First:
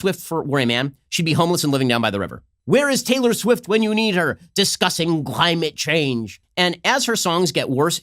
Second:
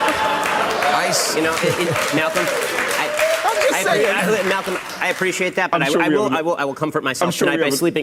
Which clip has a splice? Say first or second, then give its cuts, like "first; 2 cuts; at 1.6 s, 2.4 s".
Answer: first; 2 cuts; at 2.5 s, 6.3 s